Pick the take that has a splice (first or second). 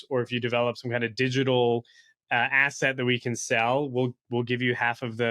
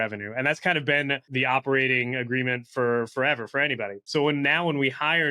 second